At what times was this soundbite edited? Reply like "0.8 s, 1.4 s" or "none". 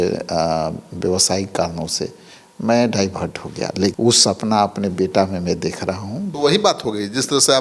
3.9 s, 6.3 s